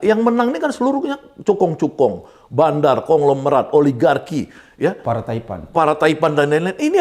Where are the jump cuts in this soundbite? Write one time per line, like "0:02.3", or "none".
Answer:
none